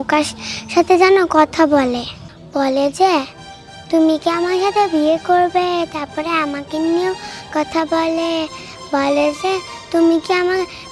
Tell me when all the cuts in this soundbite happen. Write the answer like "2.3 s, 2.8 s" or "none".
none